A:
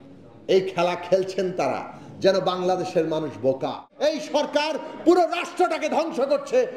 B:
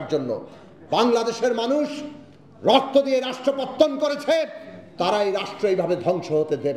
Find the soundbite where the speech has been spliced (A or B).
A